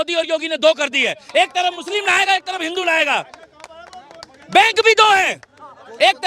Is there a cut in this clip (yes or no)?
no